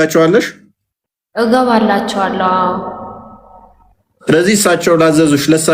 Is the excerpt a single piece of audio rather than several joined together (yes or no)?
yes